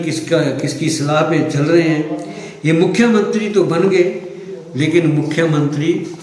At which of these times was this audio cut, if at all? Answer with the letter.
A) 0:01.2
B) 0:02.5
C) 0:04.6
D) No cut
D